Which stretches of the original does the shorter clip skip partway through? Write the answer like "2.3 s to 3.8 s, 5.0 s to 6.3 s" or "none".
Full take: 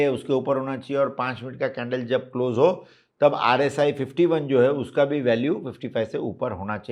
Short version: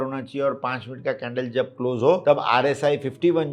2.8 s to 3.2 s